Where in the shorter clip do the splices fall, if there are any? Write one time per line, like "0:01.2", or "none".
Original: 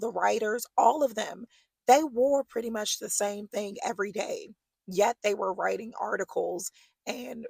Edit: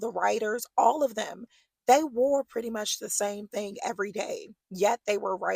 0:04.6